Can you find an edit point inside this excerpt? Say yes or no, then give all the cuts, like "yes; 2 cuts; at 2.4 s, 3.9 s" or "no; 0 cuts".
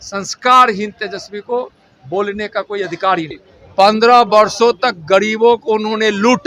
yes; 1 cut; at 3.3 s